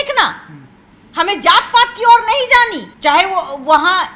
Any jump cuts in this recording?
no; 0 cuts

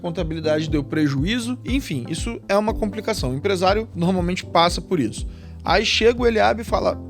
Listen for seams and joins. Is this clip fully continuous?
no; 2 cuts; at 1.6 s, 3.9 s

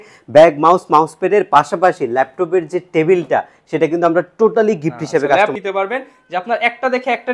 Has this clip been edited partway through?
yes; 1 cut; at 5.5 s

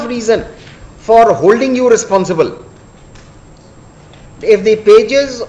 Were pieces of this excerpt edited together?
no; 0 cuts

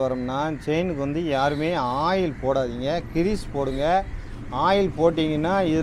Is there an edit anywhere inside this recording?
no; 0 cuts

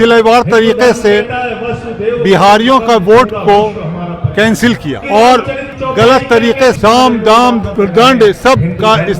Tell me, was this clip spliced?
yes; 4 cuts; at 5.0 s, 5.7 s, 6.8 s, 7.7 s

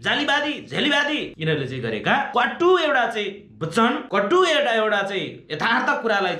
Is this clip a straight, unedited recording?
no; 3 cuts; at 1.3 s, 2.3 s, 4.0 s

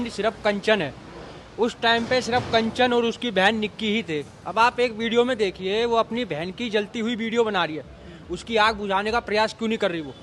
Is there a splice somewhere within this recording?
no; 0 cuts

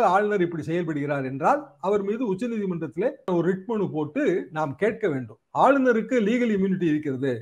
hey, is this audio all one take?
no; 2 cuts; at 3.3 s, 5.3 s

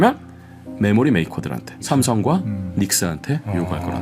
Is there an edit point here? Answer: yes; 1 cut; at 1.8 s

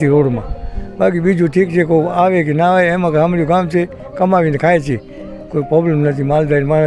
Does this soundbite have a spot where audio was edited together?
no; 0 cuts

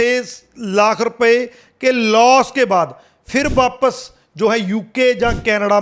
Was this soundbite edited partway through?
no; 0 cuts

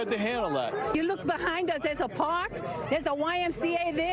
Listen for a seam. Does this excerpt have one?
no; 0 cuts

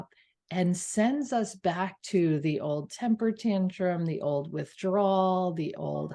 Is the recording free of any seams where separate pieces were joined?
yes; 0 cuts

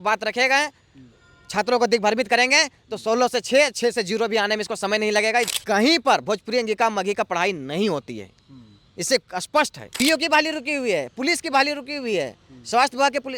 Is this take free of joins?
no; 2 cuts; at 5.5 s, 9.8 s

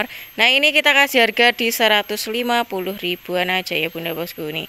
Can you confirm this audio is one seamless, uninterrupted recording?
yes; 0 cuts

